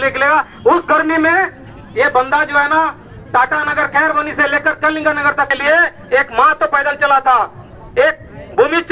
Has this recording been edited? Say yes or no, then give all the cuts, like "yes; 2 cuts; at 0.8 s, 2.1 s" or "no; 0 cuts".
yes; 1 cut; at 5.5 s